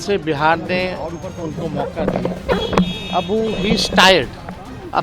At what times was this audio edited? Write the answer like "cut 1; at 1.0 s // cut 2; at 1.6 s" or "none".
none